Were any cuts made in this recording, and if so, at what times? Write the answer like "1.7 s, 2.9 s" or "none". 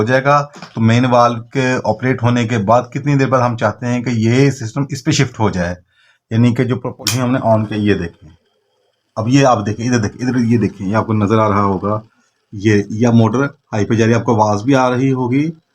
6.9 s